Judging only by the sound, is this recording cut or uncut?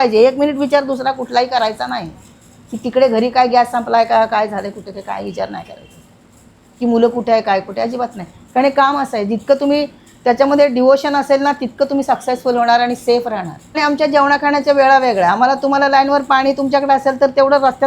cut